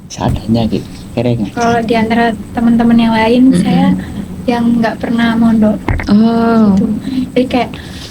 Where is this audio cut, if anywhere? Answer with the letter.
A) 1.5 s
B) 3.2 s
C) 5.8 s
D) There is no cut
A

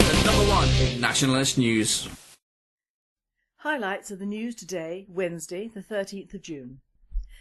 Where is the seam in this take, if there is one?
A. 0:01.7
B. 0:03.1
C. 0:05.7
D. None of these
B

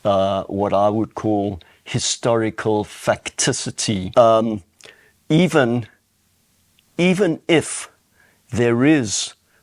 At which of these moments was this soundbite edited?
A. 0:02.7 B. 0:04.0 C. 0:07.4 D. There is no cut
B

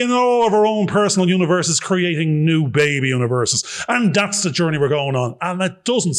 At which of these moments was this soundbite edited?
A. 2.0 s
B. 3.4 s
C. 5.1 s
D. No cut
D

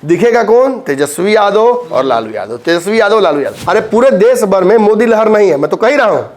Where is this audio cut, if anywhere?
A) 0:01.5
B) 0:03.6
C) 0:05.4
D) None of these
B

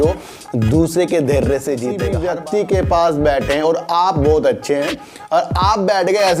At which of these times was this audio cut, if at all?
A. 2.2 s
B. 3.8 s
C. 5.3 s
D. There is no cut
A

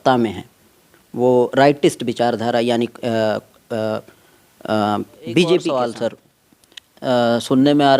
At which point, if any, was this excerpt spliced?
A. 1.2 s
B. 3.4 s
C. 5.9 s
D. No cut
C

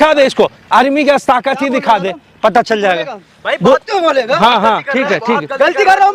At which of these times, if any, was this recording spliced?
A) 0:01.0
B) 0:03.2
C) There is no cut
C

